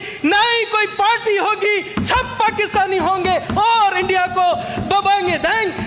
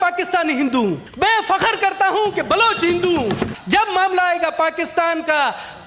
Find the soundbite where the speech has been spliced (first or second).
second